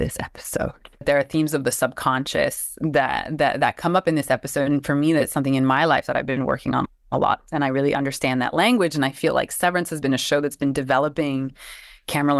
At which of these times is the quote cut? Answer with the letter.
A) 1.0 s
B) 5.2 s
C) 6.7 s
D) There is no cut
A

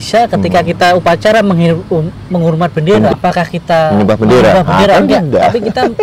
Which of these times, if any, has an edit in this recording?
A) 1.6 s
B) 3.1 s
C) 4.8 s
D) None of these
B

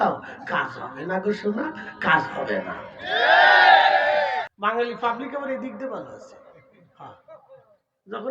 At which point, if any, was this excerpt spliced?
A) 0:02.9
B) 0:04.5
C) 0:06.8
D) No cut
B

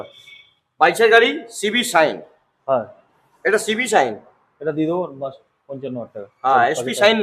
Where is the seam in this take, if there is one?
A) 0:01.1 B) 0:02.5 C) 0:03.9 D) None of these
D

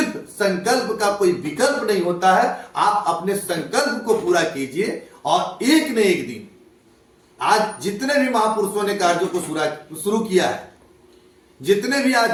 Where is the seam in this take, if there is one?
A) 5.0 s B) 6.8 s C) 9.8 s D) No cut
D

